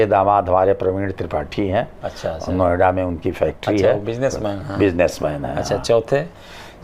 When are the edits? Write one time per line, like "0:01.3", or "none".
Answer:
none